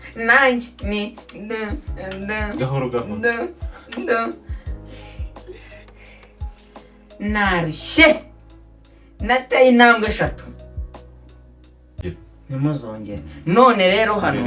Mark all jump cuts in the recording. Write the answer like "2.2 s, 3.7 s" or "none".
12.0 s